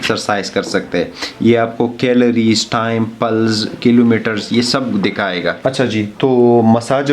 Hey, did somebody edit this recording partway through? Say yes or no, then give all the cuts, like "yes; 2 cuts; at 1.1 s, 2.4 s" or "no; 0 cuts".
yes; 1 cut; at 5.6 s